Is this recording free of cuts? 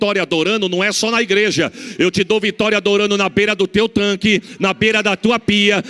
yes; 0 cuts

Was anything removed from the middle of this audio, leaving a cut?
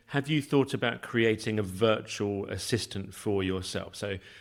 no; 0 cuts

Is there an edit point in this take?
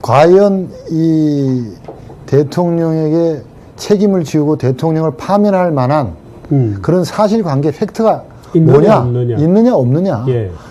yes; 1 cut; at 6.3 s

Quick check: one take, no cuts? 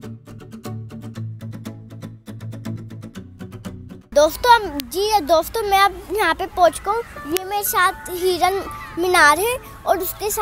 no; 1 cut; at 4.1 s

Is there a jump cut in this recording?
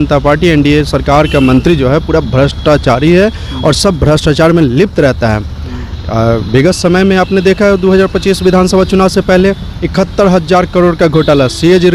no; 0 cuts

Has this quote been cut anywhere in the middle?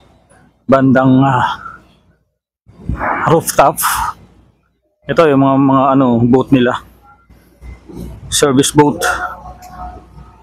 no; 0 cuts

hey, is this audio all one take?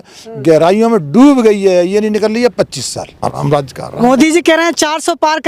no; 1 cut; at 3.2 s

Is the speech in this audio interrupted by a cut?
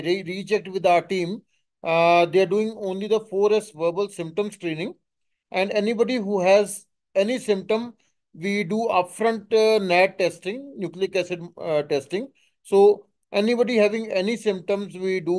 no; 0 cuts

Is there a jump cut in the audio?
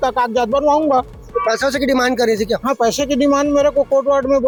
no; 0 cuts

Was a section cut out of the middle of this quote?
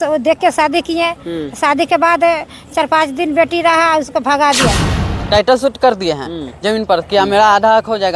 yes; 1 cut; at 4.9 s

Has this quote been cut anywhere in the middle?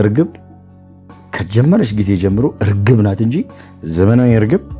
no; 0 cuts

